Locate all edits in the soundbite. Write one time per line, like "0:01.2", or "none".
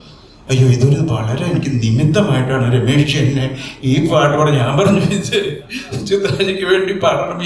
none